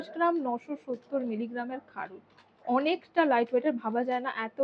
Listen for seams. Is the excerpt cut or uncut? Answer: uncut